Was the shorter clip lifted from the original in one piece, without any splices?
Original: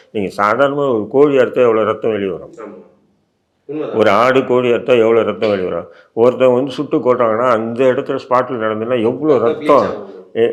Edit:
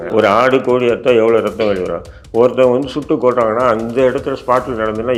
yes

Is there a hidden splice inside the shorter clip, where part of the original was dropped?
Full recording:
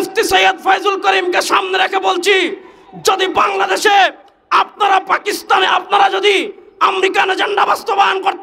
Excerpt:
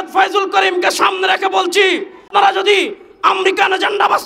yes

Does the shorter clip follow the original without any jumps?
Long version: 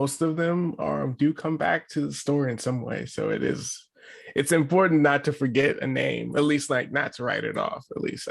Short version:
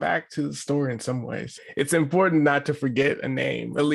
no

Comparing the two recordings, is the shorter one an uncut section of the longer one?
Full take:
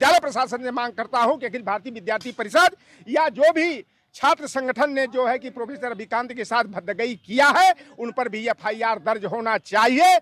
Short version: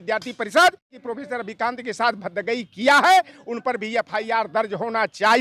no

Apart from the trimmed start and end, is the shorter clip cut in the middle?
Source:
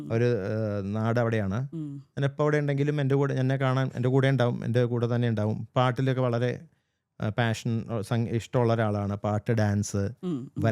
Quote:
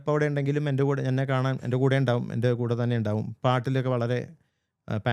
no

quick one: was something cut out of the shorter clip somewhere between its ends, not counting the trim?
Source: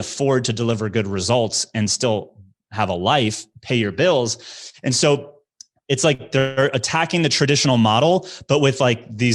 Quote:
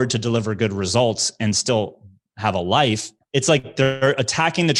yes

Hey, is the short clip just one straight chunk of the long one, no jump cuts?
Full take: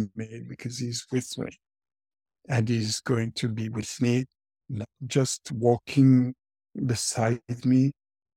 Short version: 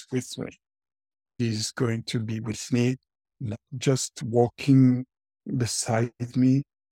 no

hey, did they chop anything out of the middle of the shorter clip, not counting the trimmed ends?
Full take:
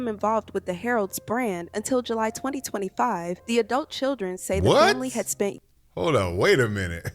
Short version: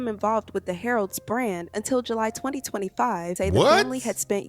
yes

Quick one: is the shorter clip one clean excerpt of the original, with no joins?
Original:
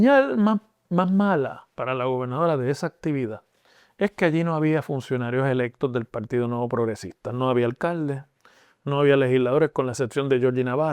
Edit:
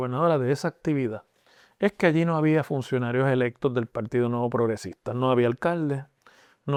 yes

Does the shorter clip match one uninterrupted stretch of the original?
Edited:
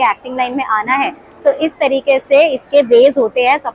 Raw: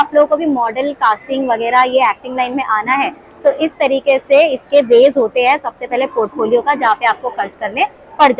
yes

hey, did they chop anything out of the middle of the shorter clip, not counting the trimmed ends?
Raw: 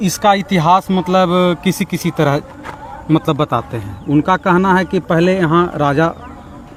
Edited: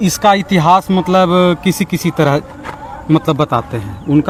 no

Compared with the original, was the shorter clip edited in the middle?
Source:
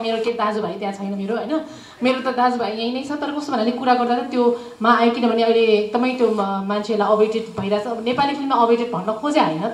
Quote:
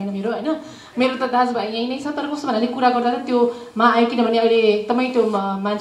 no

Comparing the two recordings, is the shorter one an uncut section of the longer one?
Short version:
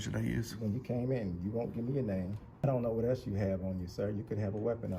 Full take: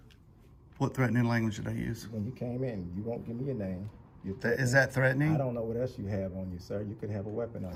no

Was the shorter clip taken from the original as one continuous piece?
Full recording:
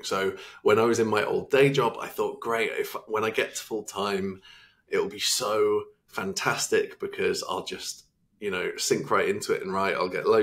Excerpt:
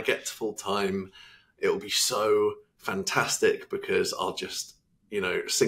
yes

